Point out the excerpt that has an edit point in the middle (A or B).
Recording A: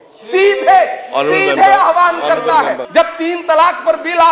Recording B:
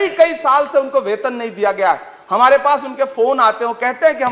A